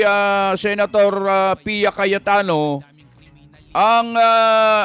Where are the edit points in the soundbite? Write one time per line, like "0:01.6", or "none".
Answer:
none